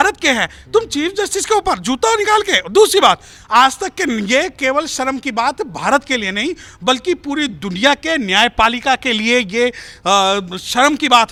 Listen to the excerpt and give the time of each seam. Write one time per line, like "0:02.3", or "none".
none